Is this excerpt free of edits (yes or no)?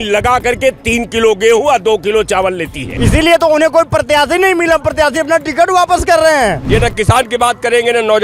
no